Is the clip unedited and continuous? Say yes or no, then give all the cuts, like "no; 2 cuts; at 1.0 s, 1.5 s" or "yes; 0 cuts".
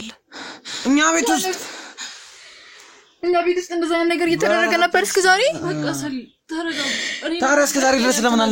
yes; 0 cuts